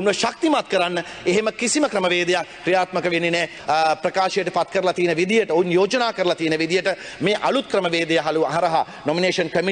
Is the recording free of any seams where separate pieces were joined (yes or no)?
no